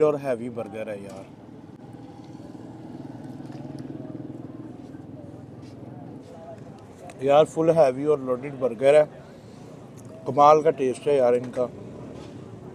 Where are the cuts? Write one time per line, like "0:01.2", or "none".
none

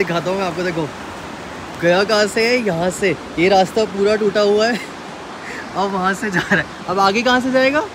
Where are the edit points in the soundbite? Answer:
none

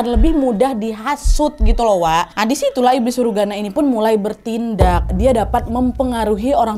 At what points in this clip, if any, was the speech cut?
0:05.1

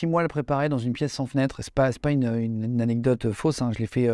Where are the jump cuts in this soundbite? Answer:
none

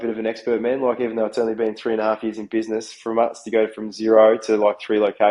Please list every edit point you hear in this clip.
none

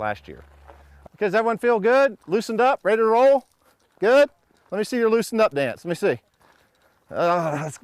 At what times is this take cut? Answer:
0:03.0

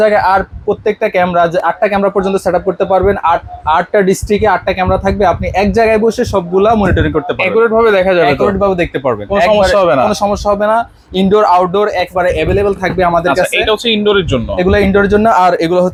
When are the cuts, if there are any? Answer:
none

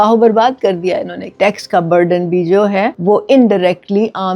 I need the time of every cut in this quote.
0:01.2
0:02.9

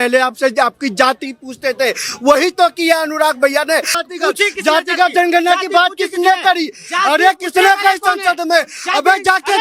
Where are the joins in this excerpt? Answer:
0:04.0

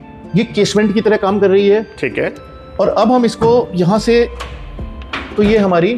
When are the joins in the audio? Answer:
none

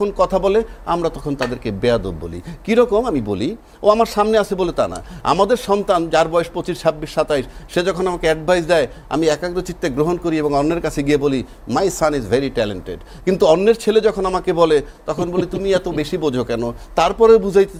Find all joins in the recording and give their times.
none

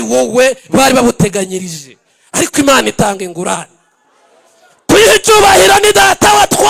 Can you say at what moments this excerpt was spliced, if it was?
none

